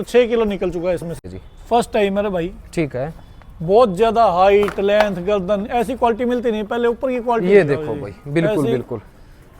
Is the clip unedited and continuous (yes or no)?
no